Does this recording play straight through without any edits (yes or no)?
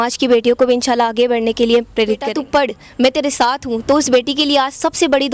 no